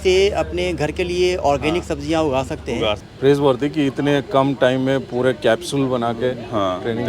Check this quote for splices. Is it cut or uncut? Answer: cut